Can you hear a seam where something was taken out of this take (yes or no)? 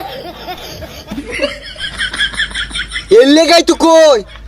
yes